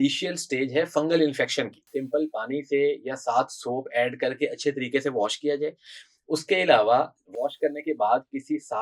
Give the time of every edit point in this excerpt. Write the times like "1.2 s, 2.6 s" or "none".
1.9 s